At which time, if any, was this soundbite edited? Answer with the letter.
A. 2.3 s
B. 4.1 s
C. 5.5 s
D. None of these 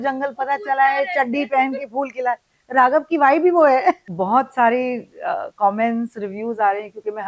B